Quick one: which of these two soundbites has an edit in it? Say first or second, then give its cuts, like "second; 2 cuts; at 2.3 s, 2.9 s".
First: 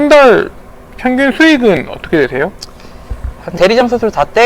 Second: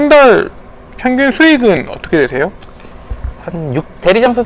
first; 1 cut; at 3.5 s